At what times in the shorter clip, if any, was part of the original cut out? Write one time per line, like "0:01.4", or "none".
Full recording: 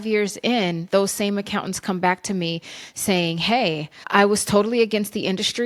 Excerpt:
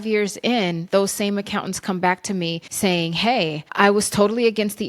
0:02.6
0:03.6